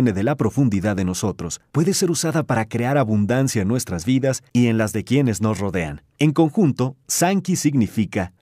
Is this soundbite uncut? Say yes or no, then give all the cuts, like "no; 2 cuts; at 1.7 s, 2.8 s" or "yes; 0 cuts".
yes; 0 cuts